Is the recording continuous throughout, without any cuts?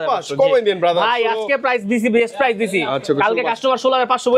yes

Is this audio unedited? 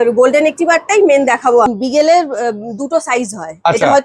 no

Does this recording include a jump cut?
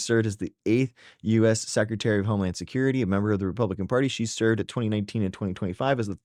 no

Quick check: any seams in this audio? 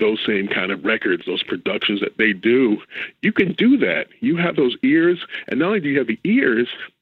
no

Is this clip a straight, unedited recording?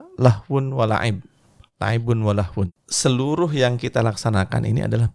no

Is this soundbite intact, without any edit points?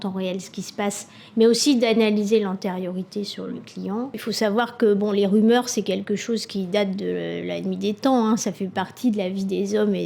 no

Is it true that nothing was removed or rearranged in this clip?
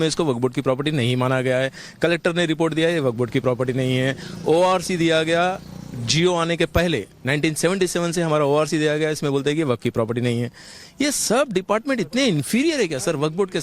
no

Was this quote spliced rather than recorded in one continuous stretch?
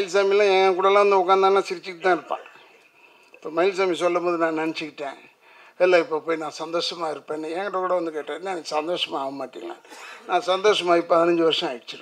no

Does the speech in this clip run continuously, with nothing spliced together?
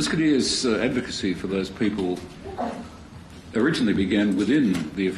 no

